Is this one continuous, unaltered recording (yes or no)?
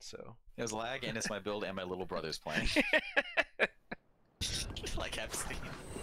no